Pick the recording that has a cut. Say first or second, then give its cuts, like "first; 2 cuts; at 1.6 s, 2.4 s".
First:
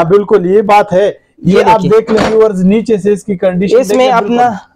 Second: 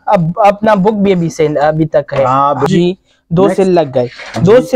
second; 1 cut; at 2.7 s